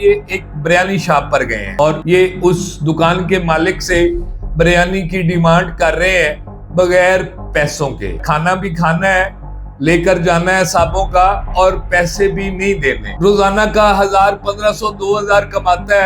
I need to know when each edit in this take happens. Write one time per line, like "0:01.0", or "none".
0:08.2
0:13.1